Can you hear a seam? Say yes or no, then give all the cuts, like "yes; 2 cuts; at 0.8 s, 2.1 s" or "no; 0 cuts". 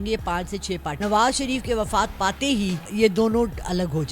yes; 2 cuts; at 0.9 s, 2.8 s